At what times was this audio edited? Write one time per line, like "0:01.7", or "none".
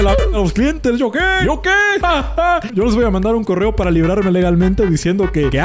0:02.7